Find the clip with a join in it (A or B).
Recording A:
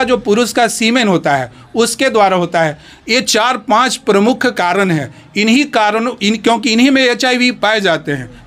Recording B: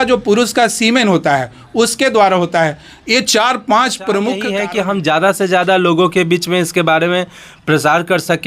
B